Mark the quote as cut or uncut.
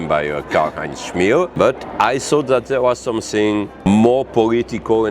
cut